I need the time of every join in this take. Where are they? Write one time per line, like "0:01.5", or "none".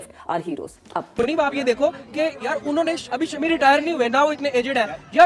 0:01.1